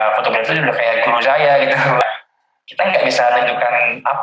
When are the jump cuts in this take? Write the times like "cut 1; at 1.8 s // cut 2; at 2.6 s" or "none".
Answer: cut 1; at 2.0 s